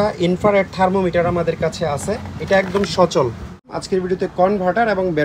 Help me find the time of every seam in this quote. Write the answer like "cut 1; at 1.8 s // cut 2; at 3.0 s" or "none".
cut 1; at 3.7 s